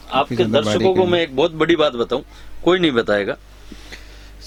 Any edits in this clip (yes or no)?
no